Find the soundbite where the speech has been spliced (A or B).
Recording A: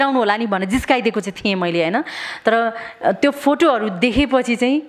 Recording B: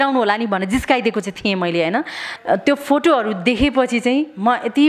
B